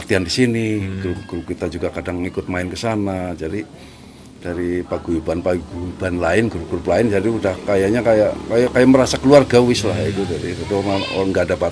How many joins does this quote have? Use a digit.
0